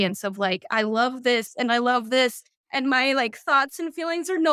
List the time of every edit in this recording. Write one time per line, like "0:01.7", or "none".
none

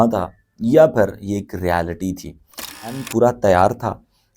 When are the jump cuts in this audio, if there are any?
0:02.9

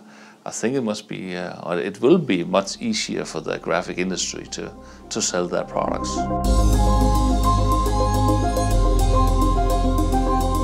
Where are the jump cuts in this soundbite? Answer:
0:06.0

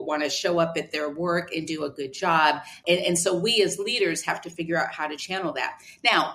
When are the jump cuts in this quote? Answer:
0:02.8

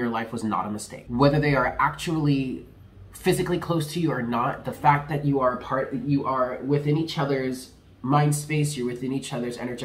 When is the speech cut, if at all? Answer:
0:00.9

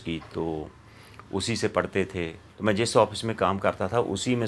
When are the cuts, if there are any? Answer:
0:02.4

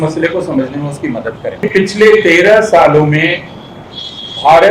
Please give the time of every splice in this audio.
0:01.6

